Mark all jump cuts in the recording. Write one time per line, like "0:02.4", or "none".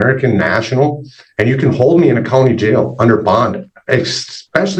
none